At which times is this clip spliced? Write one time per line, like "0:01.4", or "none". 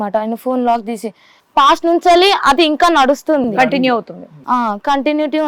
0:01.4